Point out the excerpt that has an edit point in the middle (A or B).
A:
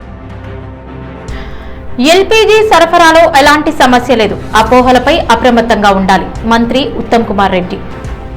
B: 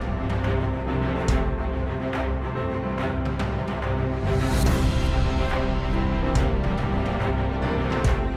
A